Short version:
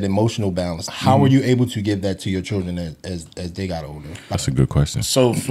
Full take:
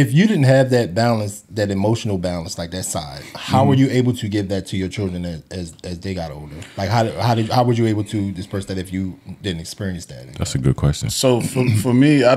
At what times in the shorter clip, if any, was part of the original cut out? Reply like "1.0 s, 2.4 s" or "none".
0.9 s, 4.3 s